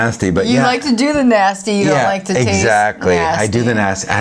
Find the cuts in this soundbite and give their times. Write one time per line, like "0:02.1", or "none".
none